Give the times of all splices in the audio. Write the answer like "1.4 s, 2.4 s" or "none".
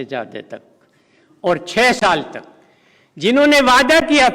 none